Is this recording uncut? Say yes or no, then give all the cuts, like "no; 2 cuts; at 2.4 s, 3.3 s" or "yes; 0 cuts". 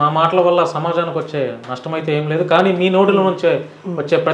yes; 0 cuts